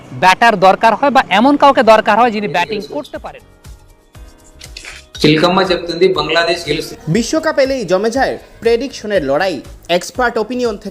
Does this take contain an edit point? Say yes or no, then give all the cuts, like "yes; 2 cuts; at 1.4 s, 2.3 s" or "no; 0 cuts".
yes; 1 cut; at 3.2 s